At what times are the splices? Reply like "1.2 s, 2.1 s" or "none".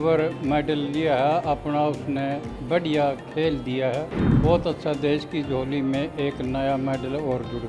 4.2 s

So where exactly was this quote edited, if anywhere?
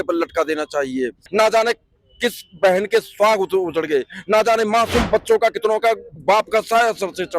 1.2 s, 6.1 s

